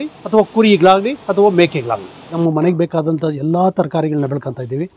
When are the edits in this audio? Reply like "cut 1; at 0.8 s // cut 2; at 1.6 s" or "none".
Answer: cut 1; at 2.4 s

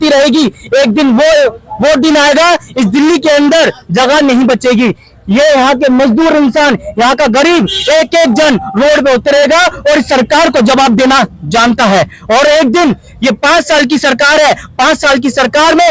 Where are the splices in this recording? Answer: none

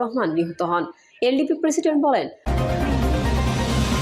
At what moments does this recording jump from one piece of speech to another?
cut 1; at 2.4 s

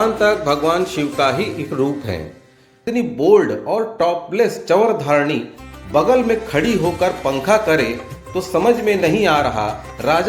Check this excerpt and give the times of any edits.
cut 1; at 2.8 s

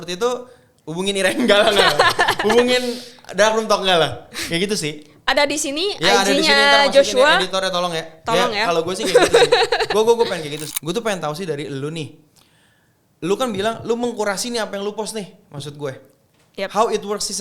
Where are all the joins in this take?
cut 1; at 10.7 s

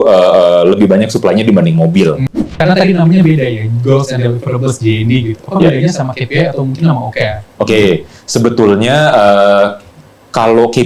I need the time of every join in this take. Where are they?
cut 1; at 2.3 s

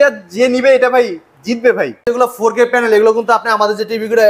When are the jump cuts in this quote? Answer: cut 1; at 2.0 s

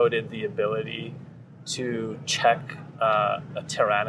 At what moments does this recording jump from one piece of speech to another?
none

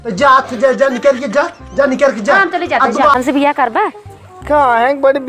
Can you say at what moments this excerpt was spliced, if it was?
cut 1; at 3.1 s

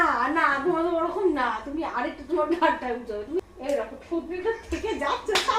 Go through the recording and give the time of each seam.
cut 1; at 3.4 s

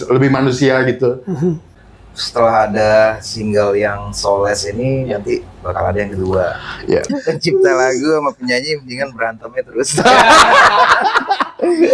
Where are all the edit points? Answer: cut 1; at 1.7 s // cut 2; at 7.1 s

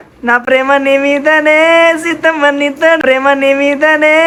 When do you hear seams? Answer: none

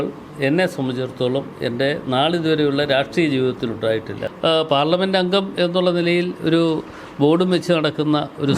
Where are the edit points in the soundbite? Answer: cut 1; at 4.2 s

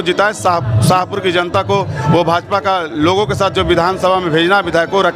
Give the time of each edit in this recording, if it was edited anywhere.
none

